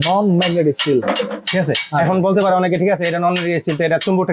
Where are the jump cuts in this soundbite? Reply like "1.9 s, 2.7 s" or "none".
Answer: none